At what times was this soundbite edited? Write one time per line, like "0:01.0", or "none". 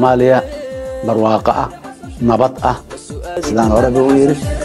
0:03.4